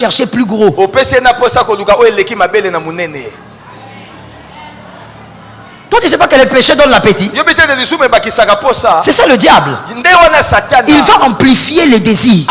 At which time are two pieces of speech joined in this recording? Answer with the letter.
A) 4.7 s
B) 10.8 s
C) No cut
C